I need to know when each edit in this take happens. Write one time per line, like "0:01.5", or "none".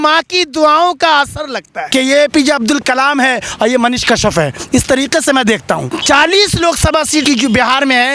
0:01.8
0:05.9
0:07.2